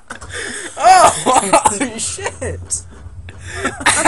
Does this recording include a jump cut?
yes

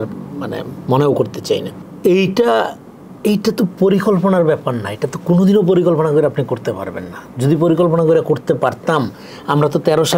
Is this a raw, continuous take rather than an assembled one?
no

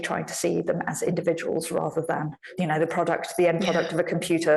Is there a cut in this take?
yes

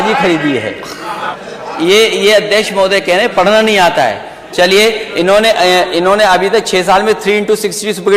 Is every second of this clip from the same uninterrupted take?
no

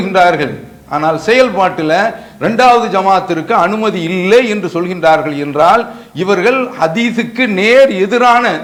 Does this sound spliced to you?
no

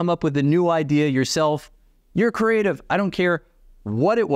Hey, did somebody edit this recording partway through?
no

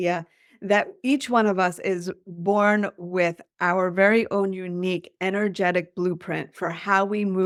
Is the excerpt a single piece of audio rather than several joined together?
yes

